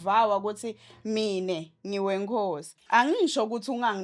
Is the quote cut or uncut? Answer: cut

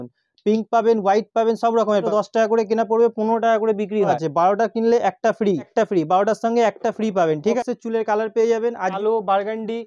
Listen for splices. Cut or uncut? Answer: cut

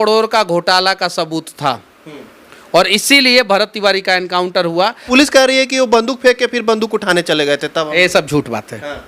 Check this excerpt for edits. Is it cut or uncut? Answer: cut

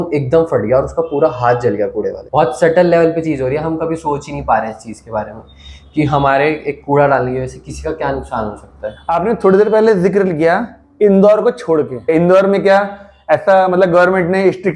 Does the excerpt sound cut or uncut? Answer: uncut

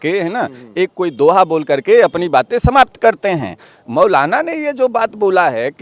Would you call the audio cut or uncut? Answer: uncut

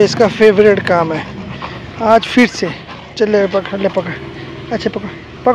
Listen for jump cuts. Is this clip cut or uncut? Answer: uncut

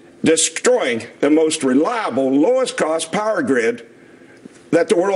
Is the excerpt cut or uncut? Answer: uncut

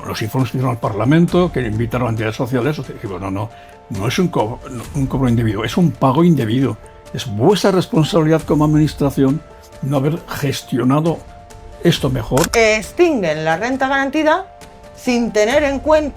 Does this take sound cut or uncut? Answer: cut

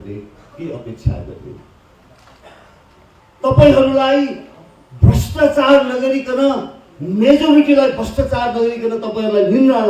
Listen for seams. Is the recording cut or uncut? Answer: cut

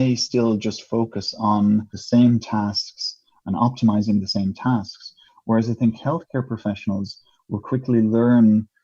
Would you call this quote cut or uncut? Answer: cut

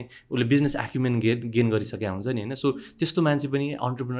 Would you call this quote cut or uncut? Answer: uncut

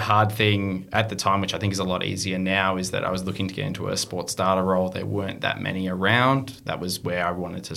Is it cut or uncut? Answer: uncut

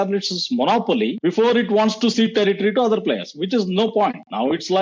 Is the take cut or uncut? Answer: cut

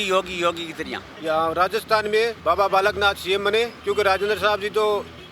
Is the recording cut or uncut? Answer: cut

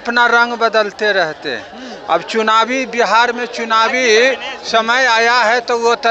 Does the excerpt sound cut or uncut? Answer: uncut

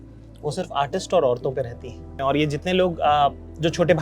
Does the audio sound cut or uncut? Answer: cut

